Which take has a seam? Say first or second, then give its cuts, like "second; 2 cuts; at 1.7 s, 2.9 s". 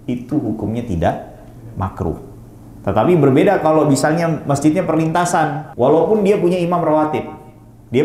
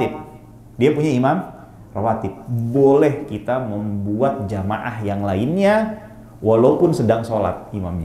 first; 1 cut; at 5.6 s